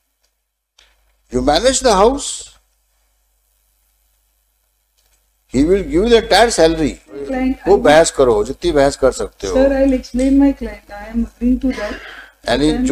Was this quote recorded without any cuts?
no; 1 cut; at 7.3 s

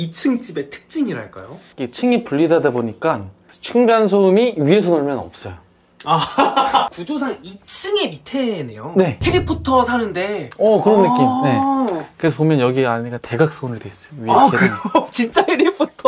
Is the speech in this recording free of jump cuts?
no; 2 cuts; at 6.9 s, 9.2 s

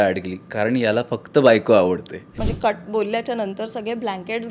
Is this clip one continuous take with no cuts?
no; 1 cut; at 2.4 s

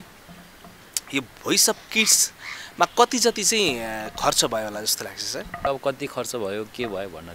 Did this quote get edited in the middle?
yes; 1 cut; at 5.7 s

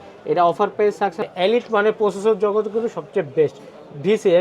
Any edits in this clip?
yes; 1 cut; at 1.2 s

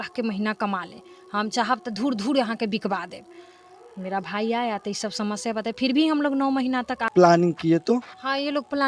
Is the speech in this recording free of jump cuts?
no; 1 cut; at 7.0 s

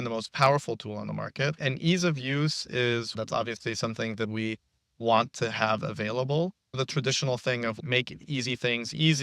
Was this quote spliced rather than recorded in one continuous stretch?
yes; 3 cuts; at 3.1 s, 6.8 s, 7.8 s

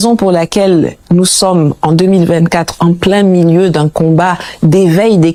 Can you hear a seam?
no; 0 cuts

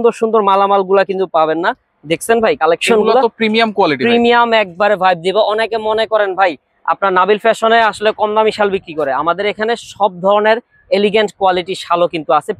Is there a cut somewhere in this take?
no; 0 cuts

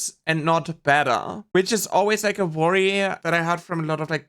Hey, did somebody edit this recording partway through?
yes; 1 cut; at 3.2 s

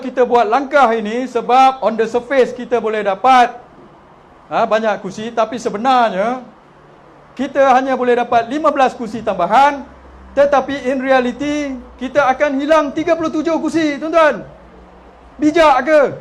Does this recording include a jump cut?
no; 0 cuts

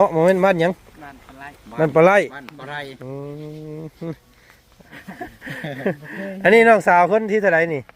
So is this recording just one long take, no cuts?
no; 1 cut; at 5.0 s

